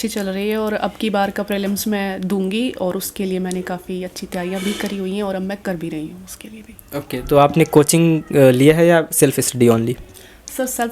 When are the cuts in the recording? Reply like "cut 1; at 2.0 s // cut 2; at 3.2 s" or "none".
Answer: none